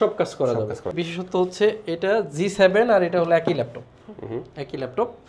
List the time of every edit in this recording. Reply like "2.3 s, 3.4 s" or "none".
0.9 s